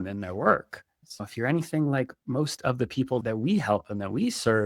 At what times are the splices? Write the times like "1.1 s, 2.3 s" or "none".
1.2 s, 3.2 s